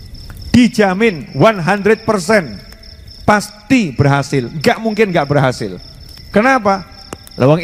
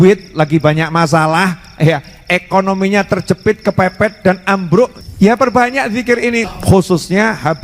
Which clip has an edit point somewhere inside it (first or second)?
second